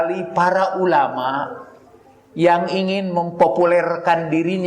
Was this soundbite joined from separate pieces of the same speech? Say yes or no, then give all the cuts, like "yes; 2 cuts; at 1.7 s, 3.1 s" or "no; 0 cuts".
no; 0 cuts